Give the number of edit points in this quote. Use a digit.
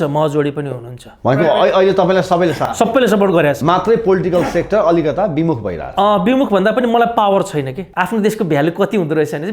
1